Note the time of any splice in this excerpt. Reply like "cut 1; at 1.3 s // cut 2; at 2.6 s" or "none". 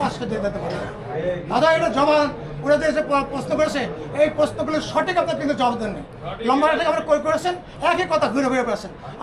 none